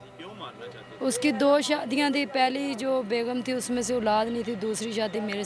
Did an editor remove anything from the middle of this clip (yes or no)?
no